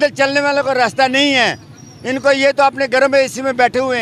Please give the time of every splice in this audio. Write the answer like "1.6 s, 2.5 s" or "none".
none